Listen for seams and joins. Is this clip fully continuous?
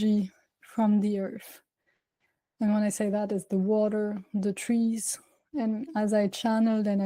yes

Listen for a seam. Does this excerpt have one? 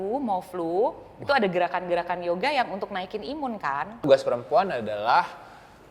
yes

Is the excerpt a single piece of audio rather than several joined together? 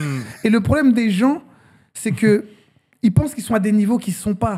yes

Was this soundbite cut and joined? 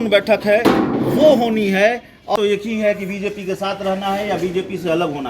yes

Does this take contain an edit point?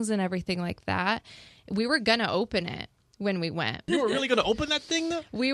yes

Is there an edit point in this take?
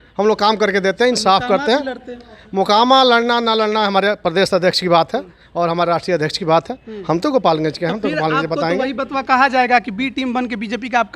no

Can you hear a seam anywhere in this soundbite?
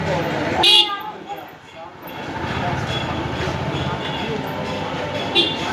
no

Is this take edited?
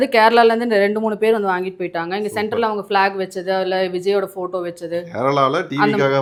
no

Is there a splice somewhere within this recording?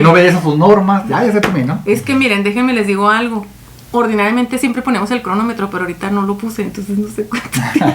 yes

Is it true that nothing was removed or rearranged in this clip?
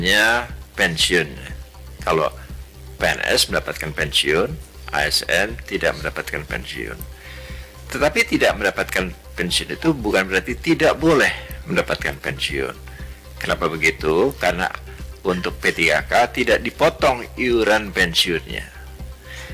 yes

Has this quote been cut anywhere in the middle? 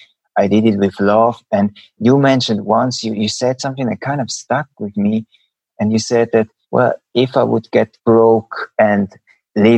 yes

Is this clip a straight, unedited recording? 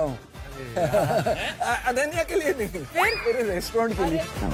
yes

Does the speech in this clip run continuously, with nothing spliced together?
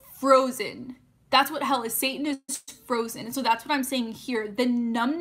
yes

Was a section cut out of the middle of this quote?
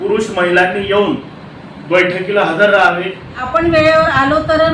yes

